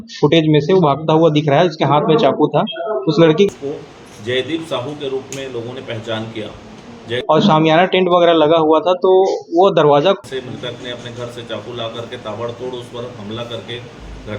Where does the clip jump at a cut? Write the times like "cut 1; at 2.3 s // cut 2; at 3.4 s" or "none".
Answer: cut 1; at 3.5 s // cut 2; at 7.1 s // cut 3; at 10.2 s